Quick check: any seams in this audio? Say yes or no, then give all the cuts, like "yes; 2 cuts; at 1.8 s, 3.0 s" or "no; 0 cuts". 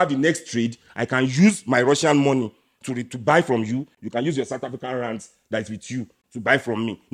no; 0 cuts